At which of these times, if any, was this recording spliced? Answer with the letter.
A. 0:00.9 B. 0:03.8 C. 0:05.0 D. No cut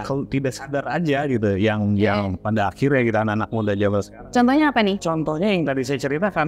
C